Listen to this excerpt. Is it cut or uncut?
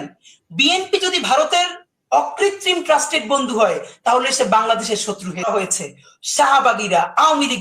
cut